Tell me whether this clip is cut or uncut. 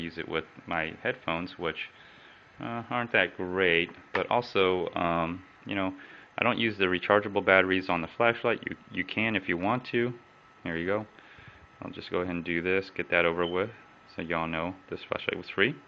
uncut